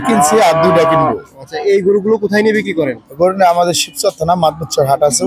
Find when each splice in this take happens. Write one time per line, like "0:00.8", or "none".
none